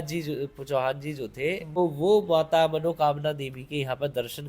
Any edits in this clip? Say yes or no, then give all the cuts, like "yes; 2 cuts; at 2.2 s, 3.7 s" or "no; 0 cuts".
yes; 1 cut; at 1.8 s